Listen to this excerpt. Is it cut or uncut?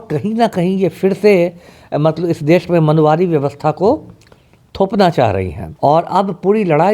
cut